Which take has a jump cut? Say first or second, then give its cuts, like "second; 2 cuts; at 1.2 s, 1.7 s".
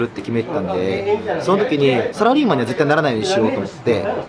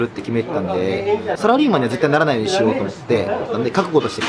second; 2 cuts; at 1.4 s, 3.5 s